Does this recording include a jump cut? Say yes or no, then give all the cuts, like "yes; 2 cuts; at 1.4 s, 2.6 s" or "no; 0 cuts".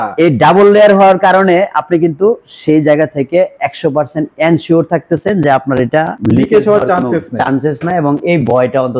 yes; 1 cut; at 6.1 s